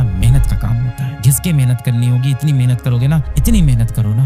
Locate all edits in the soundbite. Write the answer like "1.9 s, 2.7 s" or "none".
1.2 s

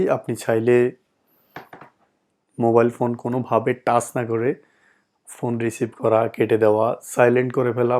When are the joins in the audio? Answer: none

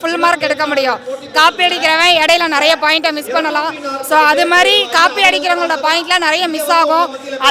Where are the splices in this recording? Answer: none

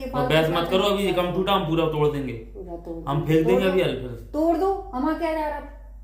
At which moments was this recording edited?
none

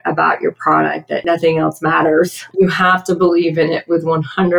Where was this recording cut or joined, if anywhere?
1.2 s, 2.4 s

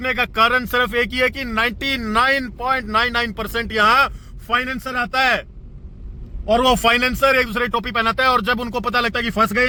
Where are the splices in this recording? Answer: none

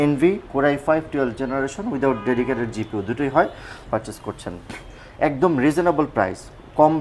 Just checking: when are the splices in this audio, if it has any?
3.8 s

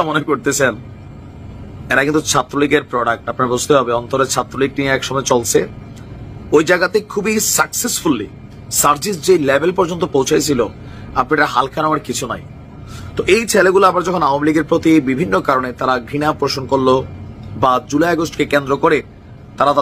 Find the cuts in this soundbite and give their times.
none

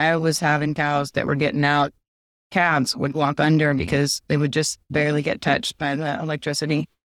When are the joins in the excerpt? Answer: 4.9 s

